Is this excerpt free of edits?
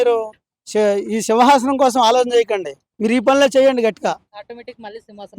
yes; 0 cuts

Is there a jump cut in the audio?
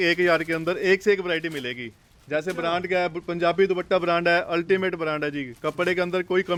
no; 0 cuts

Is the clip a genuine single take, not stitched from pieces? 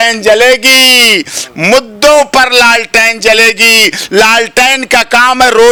yes; 0 cuts

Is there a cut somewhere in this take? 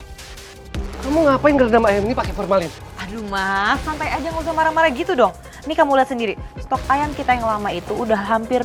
no; 0 cuts

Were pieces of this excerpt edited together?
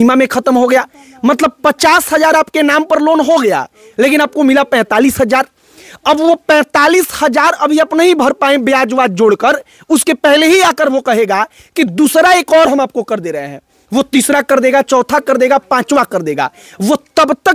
no; 0 cuts

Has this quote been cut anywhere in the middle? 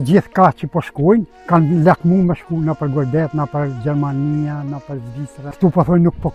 yes; 2 cuts; at 1.4 s, 5.4 s

